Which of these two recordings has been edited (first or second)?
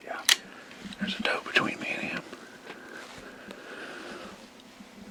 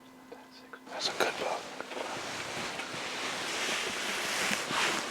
second